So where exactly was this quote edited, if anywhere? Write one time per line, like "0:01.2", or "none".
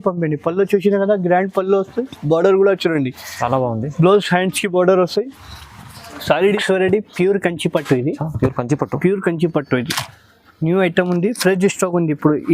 0:06.6